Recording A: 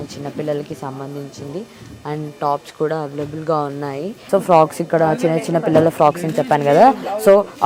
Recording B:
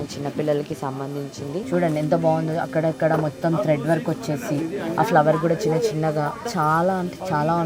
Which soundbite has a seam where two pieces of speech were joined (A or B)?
B